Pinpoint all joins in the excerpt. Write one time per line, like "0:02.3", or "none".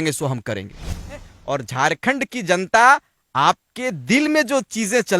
0:01.1

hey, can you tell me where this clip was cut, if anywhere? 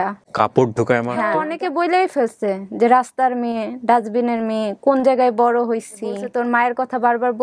0:01.4
0:06.3

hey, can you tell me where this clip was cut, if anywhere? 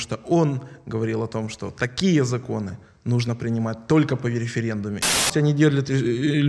0:05.1

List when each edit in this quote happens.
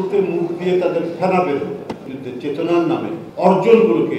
0:02.1
0:03.2

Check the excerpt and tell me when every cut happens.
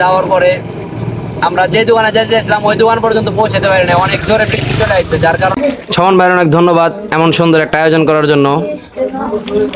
0:05.6

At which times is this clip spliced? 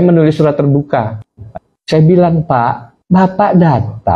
0:01.5

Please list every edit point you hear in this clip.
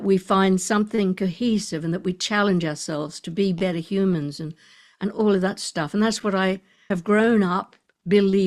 0:06.9

